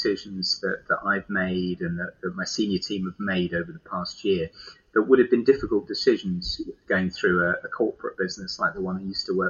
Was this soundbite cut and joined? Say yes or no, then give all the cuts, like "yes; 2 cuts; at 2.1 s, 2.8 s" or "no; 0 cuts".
no; 0 cuts